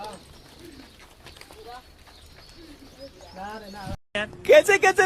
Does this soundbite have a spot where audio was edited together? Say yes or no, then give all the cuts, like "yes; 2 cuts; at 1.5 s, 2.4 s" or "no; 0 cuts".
yes; 1 cut; at 4.0 s